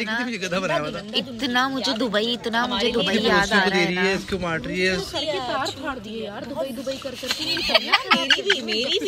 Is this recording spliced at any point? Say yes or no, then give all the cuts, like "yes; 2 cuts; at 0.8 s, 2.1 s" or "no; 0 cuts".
no; 0 cuts